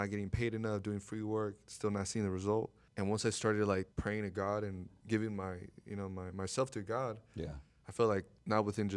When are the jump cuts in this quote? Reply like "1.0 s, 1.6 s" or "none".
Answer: none